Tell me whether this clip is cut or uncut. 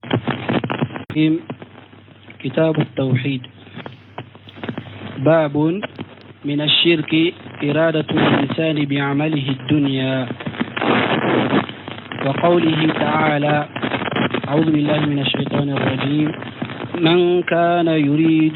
cut